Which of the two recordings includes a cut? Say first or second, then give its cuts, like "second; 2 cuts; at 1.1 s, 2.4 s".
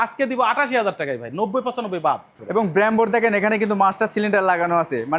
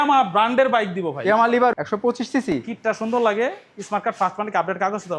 first; 1 cut; at 2.3 s